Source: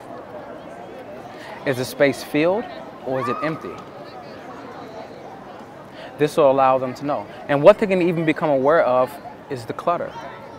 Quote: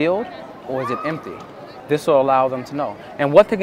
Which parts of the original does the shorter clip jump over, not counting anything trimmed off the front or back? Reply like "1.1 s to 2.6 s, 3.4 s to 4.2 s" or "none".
4.1 s to 6.0 s